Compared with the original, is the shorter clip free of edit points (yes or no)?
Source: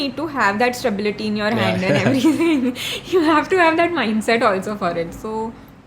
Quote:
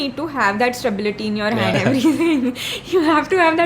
no